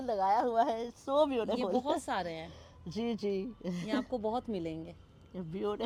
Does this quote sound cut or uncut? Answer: uncut